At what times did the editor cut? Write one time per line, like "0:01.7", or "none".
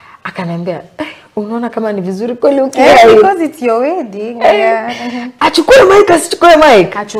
0:05.2